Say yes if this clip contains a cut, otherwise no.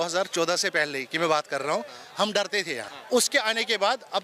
yes